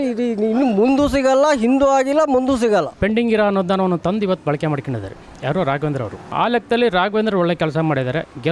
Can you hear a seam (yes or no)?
yes